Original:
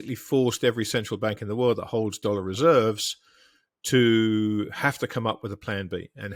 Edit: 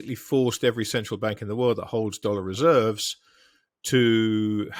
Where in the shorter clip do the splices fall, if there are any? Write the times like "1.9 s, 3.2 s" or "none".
none